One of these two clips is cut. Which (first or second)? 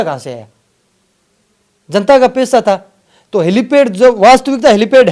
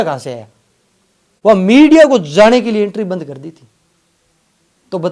second